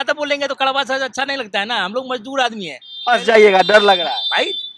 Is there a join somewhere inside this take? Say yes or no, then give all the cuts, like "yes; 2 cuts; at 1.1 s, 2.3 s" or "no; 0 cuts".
no; 0 cuts